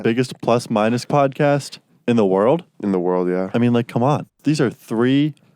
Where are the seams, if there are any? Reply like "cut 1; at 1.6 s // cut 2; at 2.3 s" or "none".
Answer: cut 1; at 2.7 s // cut 2; at 4.3 s

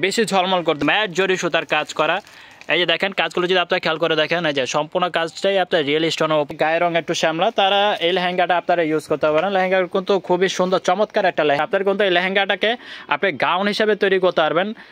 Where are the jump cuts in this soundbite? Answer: cut 1; at 0.8 s // cut 2; at 6.5 s // cut 3; at 11.6 s

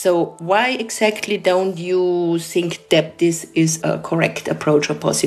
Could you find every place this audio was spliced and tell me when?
cut 1; at 3.9 s

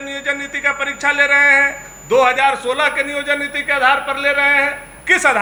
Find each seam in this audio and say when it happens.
none

